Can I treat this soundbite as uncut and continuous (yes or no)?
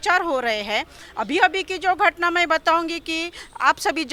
yes